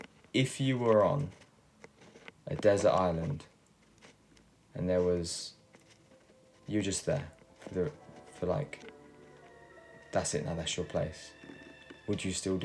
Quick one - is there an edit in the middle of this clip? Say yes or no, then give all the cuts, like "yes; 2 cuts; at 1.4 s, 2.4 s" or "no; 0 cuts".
no; 0 cuts